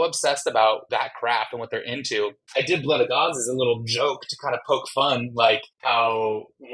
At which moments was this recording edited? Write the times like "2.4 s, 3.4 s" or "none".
2.4 s, 5.7 s